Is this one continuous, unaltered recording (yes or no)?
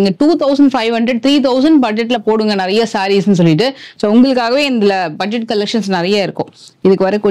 yes